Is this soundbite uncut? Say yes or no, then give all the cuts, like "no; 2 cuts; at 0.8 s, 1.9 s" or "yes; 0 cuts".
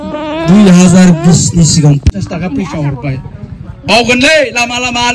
no; 1 cut; at 2.1 s